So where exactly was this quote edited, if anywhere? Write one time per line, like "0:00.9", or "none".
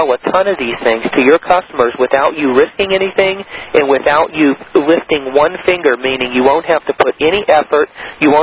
none

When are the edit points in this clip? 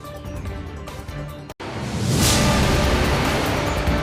0:01.5

